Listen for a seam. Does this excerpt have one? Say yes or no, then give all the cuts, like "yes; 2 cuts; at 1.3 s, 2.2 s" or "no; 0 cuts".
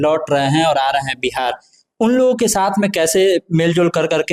no; 0 cuts